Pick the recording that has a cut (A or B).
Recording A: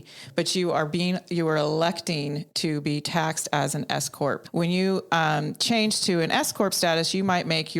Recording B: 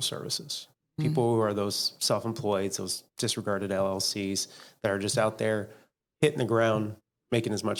A